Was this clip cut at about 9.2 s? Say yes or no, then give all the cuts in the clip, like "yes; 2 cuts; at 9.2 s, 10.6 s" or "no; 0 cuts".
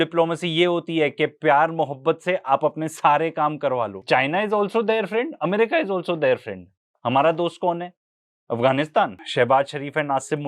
yes; 2 cuts; at 4.0 s, 9.2 s